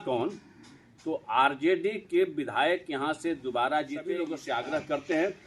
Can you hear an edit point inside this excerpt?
yes; 1 cut; at 4.2 s

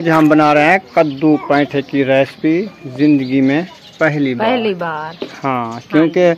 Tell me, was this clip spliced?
no; 0 cuts

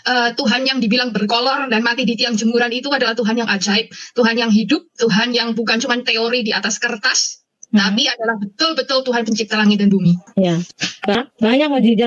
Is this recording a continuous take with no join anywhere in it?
no; 1 cut; at 11.2 s

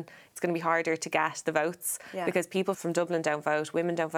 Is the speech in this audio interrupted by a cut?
yes; 1 cut; at 2.8 s

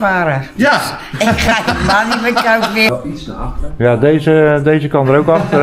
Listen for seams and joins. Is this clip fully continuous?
no; 1 cut; at 2.9 s

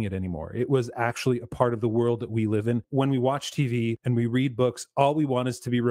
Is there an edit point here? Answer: yes; 2 cuts; at 2.9 s, 4.0 s

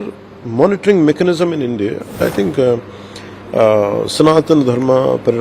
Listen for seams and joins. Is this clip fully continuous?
no; 1 cut; at 2.2 s

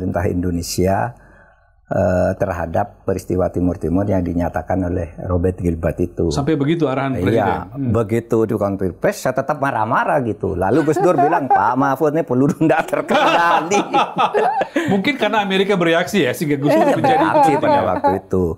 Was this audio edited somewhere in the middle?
no; 0 cuts

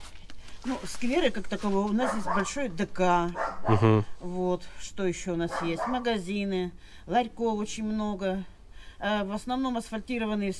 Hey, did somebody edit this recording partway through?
no; 0 cuts

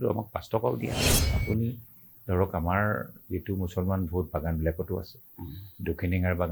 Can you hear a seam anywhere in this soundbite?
yes; 1 cut; at 0.9 s

